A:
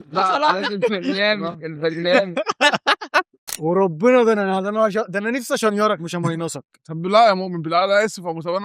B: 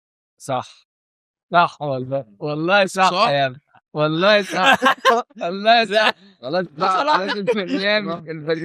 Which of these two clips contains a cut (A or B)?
A